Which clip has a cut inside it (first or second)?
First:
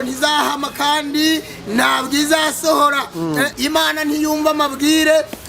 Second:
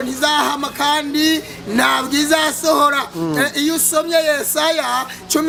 first